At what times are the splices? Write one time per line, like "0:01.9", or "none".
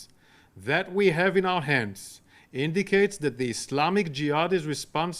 0:03.0